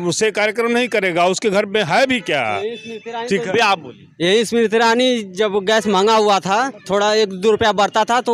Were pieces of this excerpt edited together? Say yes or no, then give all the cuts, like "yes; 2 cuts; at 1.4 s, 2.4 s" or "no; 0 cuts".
no; 0 cuts